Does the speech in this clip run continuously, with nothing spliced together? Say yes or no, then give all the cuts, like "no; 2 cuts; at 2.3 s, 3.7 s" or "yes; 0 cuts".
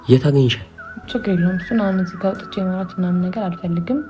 yes; 0 cuts